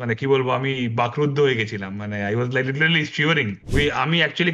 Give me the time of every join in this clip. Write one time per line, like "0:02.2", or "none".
0:03.6